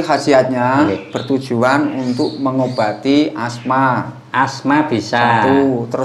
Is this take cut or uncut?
uncut